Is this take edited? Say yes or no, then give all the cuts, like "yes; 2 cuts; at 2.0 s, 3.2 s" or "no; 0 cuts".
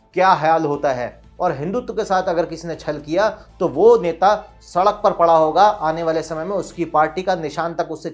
yes; 1 cut; at 1.3 s